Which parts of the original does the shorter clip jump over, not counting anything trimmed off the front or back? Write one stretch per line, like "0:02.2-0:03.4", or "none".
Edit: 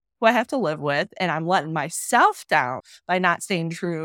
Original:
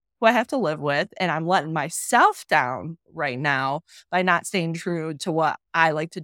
0:02.9-0:04.0